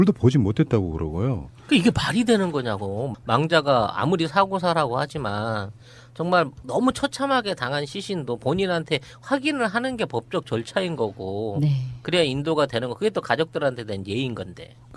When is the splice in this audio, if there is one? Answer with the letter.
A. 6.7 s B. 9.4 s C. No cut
A